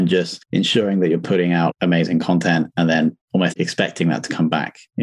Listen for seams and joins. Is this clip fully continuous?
no; 1 cut; at 3.5 s

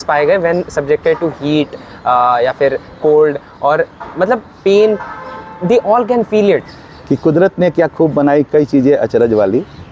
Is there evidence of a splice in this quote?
yes; 1 cut; at 6.8 s

